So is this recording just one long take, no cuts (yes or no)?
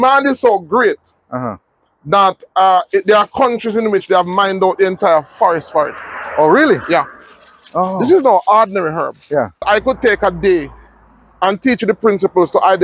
no